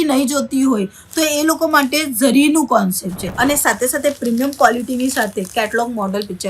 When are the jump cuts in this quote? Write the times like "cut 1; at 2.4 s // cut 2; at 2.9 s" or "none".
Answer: cut 1; at 3.2 s